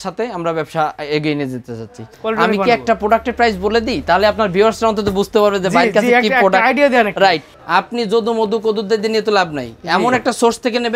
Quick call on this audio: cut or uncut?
cut